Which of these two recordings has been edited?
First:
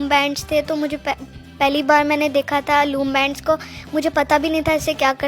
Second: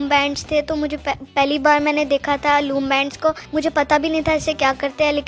second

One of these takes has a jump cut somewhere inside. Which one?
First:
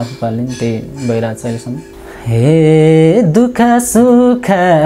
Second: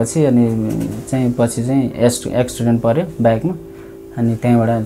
first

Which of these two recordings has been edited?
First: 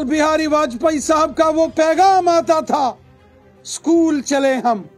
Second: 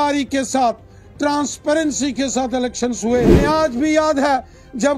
second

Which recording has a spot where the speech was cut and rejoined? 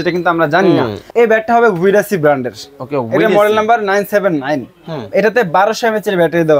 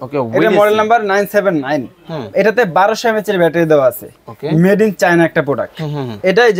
first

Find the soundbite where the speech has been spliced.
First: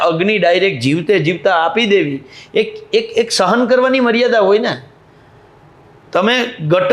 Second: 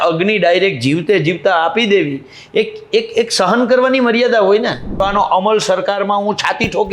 second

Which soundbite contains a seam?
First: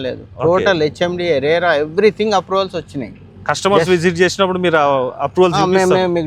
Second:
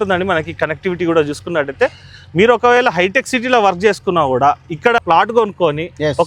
second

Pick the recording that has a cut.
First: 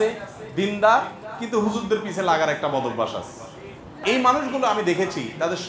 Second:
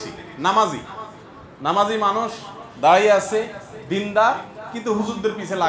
first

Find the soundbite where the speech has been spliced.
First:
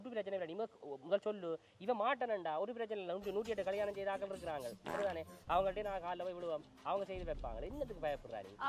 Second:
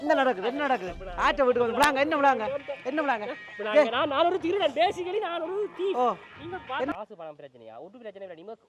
second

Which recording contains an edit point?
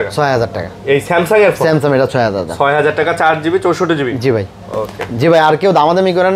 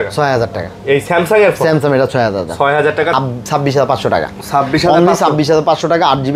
second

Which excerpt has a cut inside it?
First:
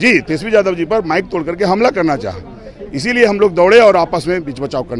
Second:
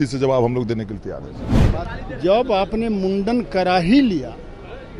second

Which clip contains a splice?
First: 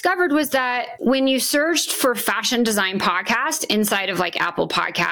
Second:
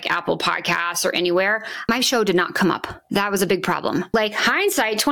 second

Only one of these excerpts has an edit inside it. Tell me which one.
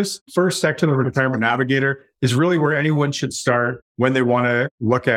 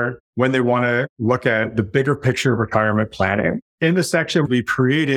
second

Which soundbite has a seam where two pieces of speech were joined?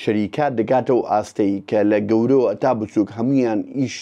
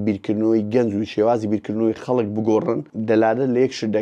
second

